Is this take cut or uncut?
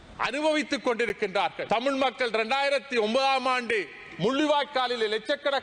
cut